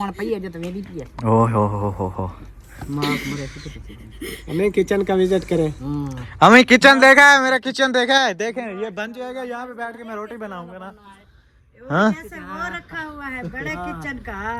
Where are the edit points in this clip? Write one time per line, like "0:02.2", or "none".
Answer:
none